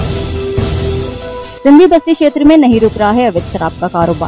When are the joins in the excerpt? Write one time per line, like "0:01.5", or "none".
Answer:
none